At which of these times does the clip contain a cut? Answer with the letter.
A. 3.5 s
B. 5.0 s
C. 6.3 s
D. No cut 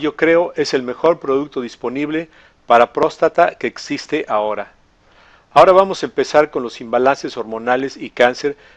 C